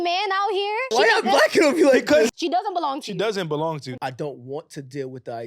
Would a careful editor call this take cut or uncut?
cut